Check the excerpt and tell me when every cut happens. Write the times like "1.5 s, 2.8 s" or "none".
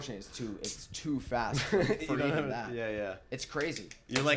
none